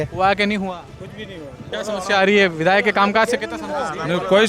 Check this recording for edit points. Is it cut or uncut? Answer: cut